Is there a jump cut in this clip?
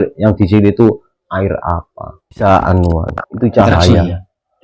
yes; 1 cut; at 2.4 s

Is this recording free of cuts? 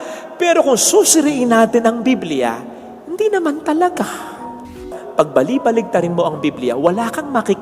no; 1 cut; at 4.7 s

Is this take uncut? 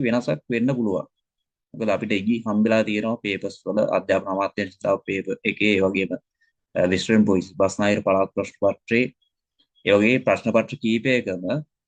yes; 0 cuts

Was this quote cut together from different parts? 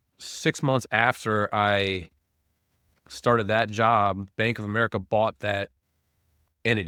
no; 0 cuts

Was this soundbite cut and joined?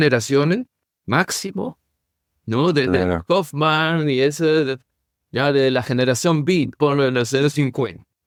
no; 0 cuts

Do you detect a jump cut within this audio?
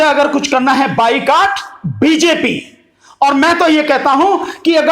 no; 0 cuts

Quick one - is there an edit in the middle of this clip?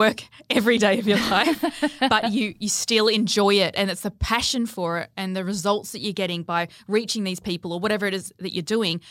no; 0 cuts

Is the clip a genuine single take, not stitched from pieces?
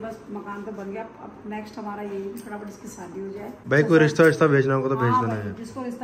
no; 1 cut; at 3.6 s

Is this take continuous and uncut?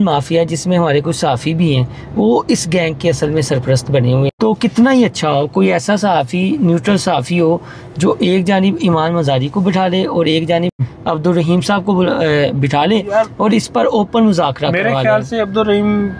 no; 2 cuts; at 4.3 s, 10.9 s

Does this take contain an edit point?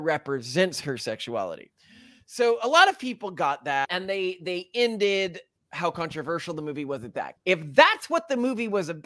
yes; 2 cuts; at 3.8 s, 7.3 s

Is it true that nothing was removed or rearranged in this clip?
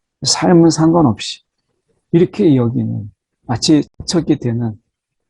no; 1 cut; at 3.9 s

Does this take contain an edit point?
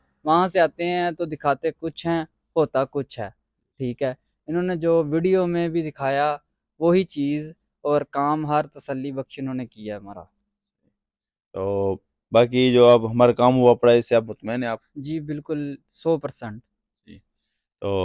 no; 0 cuts

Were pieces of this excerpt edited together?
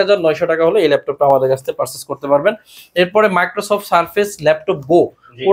no; 0 cuts

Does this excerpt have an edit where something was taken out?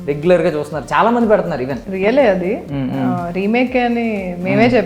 yes; 1 cut; at 1.8 s

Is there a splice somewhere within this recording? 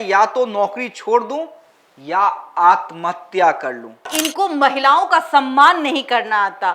yes; 1 cut; at 4.1 s

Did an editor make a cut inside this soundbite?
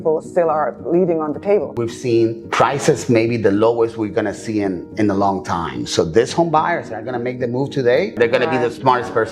yes; 2 cuts; at 1.7 s, 8.2 s

